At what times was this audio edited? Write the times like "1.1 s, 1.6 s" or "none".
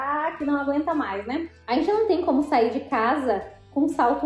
1.5 s